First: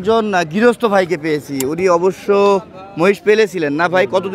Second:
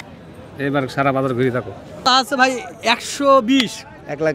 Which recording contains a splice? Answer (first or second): second